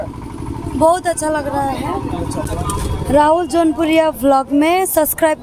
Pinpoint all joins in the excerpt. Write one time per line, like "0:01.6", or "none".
0:02.4